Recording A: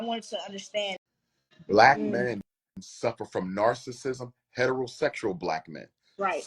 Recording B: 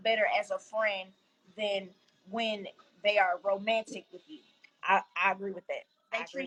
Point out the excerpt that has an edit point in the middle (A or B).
A